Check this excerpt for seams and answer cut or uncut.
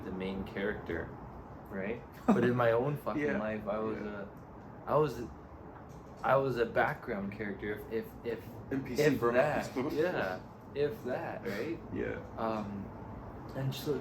uncut